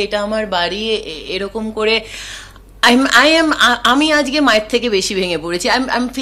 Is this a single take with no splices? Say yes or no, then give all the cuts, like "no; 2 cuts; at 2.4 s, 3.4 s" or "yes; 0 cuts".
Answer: yes; 0 cuts